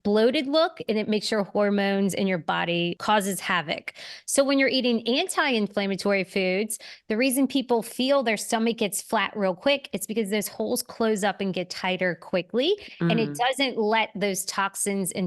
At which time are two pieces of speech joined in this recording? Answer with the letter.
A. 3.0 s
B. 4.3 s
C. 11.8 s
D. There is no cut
A